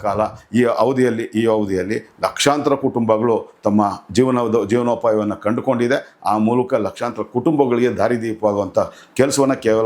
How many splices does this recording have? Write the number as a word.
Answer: zero